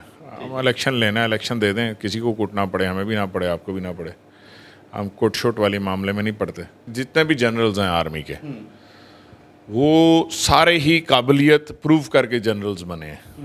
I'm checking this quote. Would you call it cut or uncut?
cut